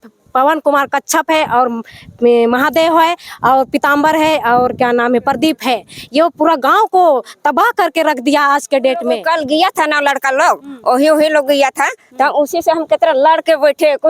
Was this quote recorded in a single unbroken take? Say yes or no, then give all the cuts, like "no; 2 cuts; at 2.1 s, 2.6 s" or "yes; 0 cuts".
no; 1 cut; at 9.2 s